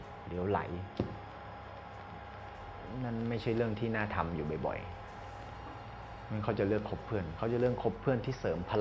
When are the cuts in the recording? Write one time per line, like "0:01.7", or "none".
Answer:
none